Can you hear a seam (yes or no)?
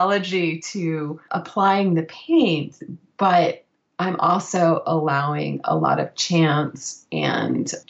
no